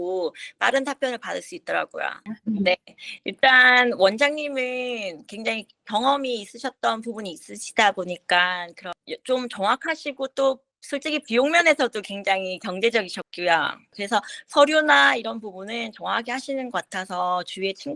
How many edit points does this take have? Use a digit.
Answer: 2